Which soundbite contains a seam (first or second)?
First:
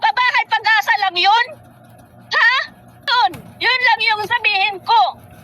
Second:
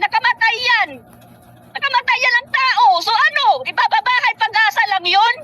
first